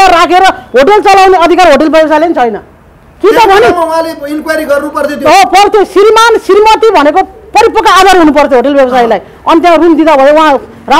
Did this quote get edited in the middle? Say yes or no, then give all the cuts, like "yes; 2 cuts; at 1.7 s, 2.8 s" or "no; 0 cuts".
no; 0 cuts